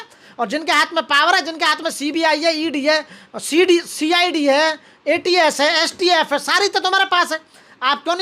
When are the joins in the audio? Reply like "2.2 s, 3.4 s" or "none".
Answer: none